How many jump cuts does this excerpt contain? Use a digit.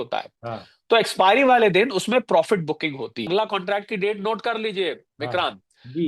1